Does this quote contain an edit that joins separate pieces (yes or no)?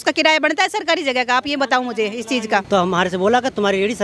yes